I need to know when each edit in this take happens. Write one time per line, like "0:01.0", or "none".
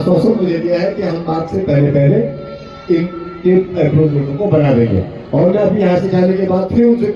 none

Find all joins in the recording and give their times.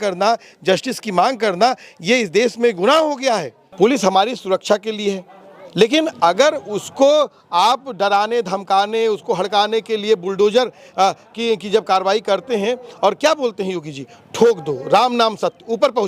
0:03.6

